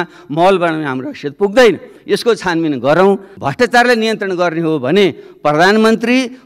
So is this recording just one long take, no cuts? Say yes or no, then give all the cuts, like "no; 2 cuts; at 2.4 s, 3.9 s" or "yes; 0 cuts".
no; 1 cut; at 3.3 s